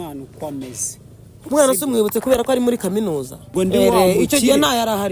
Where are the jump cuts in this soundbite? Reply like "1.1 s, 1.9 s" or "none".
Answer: 3.5 s